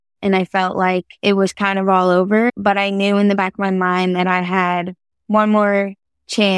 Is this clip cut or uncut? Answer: cut